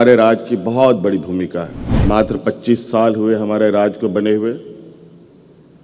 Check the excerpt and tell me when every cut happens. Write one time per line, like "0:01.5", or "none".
0:01.8